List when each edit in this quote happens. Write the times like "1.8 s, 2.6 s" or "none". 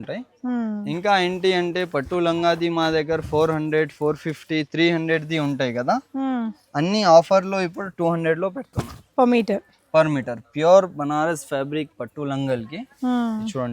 none